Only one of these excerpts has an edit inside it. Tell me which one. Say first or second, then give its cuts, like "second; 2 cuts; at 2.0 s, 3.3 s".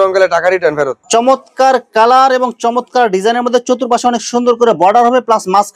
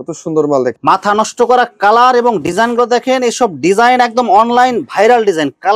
first; 1 cut; at 1.0 s